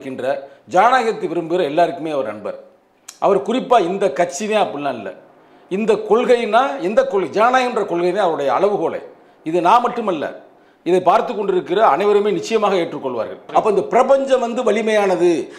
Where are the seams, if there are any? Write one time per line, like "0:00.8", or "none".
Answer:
0:13.4